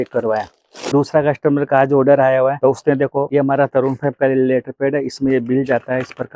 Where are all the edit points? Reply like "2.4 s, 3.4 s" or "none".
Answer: 1.1 s